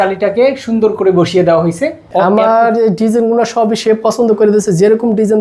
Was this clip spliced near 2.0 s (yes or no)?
yes